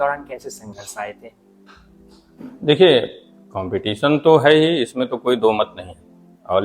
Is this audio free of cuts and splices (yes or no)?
yes